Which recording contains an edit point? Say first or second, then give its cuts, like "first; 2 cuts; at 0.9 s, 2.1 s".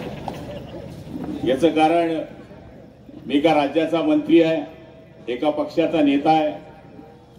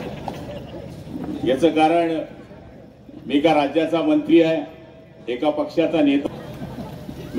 second; 1 cut; at 6.2 s